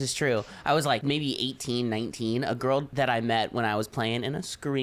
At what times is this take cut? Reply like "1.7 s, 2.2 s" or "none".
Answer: 1.0 s, 2.9 s